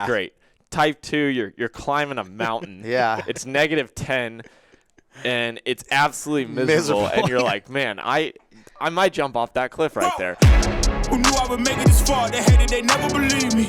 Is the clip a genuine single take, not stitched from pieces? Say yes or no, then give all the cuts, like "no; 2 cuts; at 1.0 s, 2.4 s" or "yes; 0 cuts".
no; 1 cut; at 10.1 s